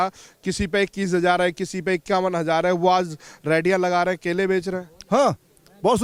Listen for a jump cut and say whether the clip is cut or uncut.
uncut